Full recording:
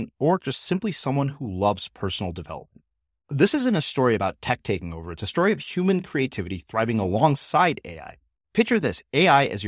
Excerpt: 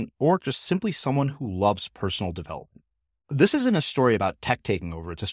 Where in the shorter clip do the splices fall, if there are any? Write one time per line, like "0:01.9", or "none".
none